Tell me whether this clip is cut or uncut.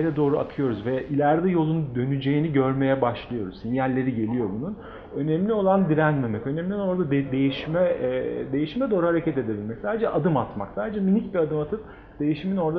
uncut